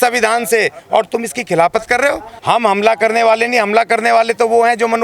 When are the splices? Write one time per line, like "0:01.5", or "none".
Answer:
0:02.3